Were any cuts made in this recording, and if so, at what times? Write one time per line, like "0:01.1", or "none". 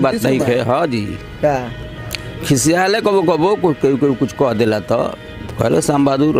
none